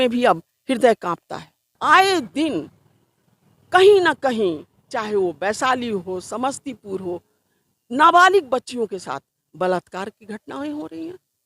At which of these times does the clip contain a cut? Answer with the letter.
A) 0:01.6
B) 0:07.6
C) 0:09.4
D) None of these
A